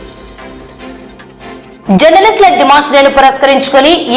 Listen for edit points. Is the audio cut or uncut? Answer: cut